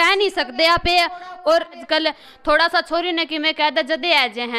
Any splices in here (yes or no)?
yes